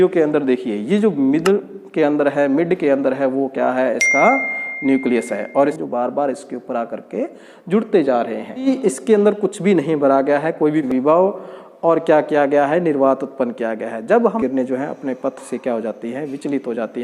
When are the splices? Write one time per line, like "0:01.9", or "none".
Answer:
0:05.8
0:08.7
0:10.9
0:14.4